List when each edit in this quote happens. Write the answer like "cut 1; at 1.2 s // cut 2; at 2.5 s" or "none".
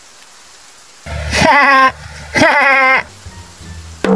cut 1; at 3.1 s